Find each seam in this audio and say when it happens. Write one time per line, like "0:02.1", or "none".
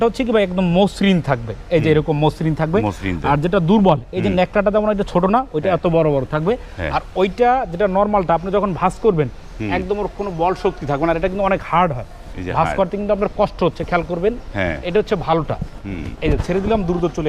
none